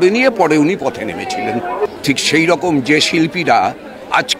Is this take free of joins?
no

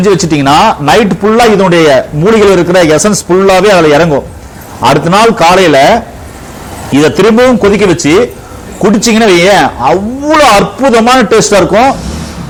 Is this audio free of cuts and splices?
yes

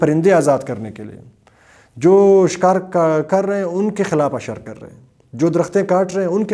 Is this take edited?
no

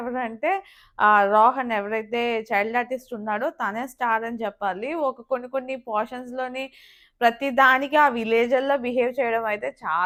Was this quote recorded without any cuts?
yes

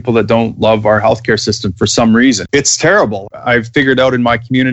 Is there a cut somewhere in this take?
yes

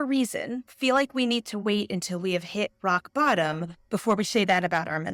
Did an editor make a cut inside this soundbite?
no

